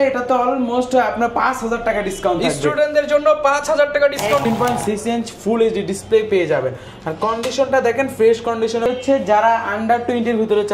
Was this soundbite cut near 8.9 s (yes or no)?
yes